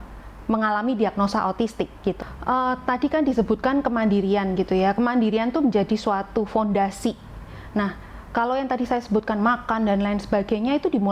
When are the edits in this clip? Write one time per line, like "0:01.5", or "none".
0:02.3